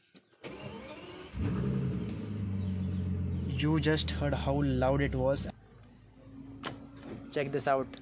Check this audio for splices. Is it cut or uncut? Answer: cut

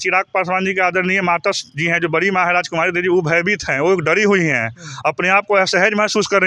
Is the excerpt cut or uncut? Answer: uncut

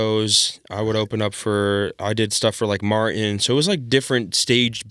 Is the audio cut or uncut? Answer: uncut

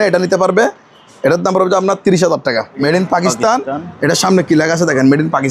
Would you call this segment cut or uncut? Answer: cut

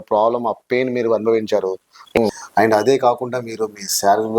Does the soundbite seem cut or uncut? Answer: cut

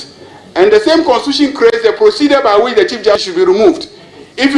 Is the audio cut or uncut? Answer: cut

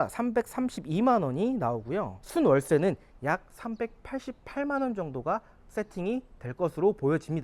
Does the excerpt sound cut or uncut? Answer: uncut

